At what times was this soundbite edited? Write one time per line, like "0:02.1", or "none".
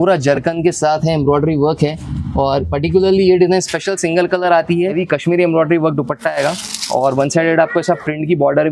0:04.9